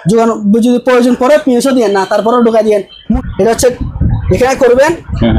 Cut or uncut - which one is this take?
cut